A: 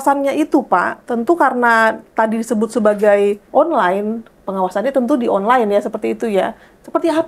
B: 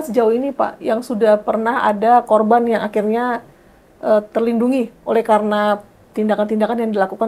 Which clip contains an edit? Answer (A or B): A